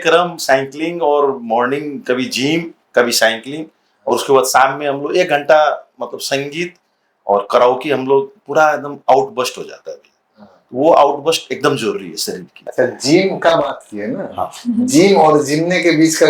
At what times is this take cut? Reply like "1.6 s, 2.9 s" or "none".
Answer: 12.6 s